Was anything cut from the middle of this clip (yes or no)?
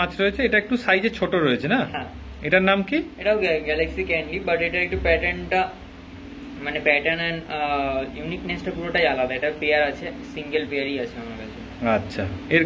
no